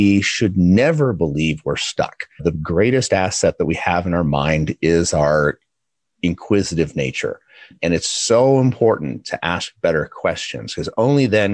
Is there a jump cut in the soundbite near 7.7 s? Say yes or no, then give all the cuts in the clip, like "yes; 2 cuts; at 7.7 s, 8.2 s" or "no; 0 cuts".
yes; 2 cuts; at 2.4 s, 7.7 s